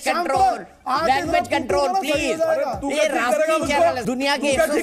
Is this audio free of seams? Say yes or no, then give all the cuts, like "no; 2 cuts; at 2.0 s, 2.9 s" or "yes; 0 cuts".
yes; 0 cuts